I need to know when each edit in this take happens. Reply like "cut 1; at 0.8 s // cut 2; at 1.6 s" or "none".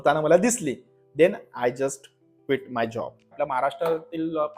cut 1; at 3.3 s